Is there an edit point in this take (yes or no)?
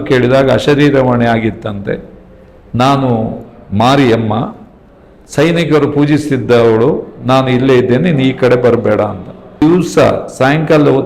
yes